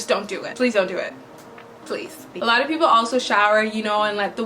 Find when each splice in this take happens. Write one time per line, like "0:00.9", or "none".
0:02.3

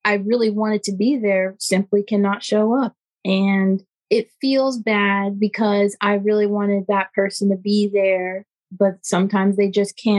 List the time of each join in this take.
0:03.9

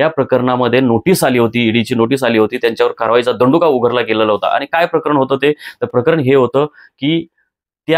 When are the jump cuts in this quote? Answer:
none

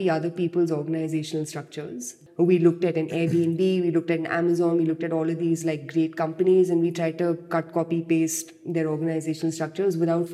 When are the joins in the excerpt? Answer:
0:02.2

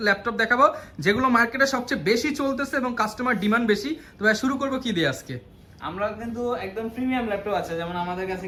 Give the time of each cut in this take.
none

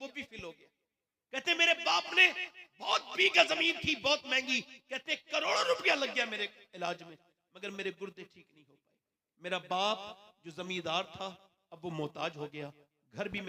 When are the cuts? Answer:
none

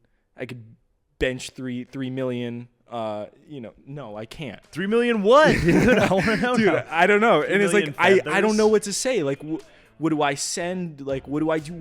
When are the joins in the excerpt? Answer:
none

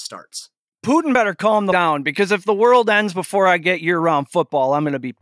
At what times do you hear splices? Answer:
0:01.6

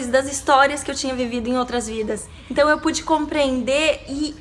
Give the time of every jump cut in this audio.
0:02.3

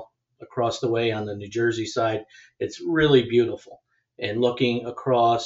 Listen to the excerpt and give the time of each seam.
none

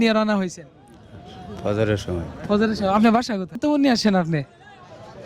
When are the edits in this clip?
0:03.6

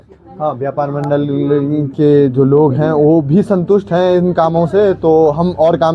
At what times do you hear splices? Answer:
none

